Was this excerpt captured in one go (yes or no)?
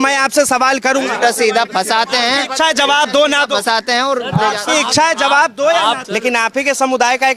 no